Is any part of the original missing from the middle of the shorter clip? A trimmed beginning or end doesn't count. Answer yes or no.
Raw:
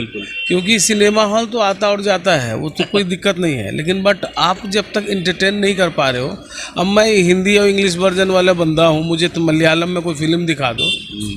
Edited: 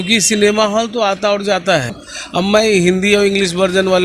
yes